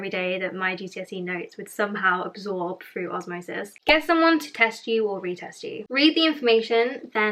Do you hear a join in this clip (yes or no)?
no